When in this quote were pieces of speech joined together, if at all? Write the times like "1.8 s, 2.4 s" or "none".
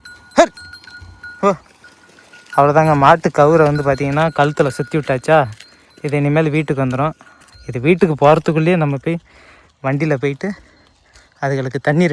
none